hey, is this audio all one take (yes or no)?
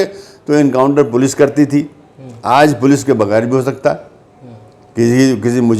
yes